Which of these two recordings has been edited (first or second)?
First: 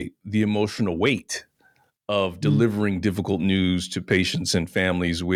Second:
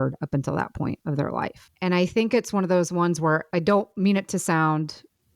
second